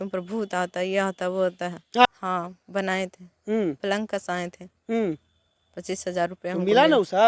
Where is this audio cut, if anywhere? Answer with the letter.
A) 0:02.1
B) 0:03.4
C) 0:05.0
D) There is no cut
A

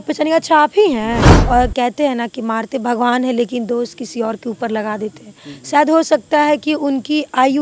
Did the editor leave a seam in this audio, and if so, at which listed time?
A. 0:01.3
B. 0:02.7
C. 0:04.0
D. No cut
A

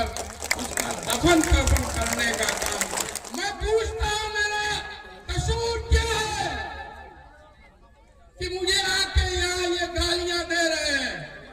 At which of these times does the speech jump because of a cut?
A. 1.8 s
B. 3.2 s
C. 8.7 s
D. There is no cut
B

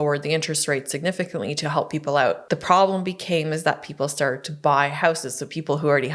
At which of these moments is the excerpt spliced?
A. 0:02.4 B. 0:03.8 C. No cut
A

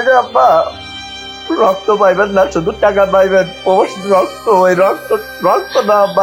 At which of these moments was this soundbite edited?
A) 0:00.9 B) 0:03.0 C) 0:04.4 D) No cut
D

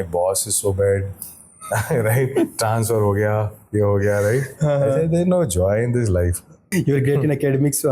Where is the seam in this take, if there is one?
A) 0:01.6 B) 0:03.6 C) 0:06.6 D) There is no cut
C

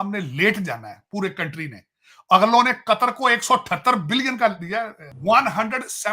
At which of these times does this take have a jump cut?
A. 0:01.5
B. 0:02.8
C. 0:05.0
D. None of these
C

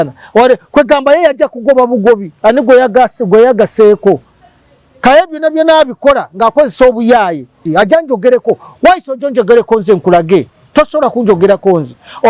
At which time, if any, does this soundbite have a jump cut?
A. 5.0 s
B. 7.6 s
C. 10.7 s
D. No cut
B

